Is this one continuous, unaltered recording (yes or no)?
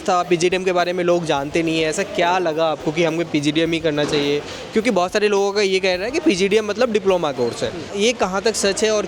yes